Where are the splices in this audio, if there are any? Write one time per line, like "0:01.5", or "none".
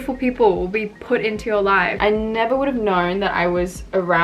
0:01.9